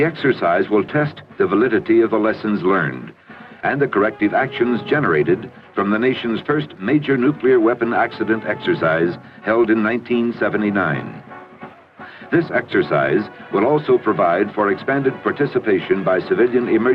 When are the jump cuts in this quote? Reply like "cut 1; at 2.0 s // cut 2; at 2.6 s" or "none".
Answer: cut 1; at 11.5 s